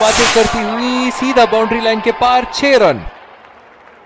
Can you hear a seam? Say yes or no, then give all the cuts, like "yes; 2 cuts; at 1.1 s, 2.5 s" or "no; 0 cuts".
yes; 1 cut; at 3.0 s